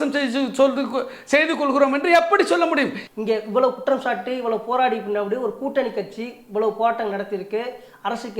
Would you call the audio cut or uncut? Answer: cut